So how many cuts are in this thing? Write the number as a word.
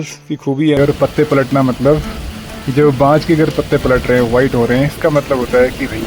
two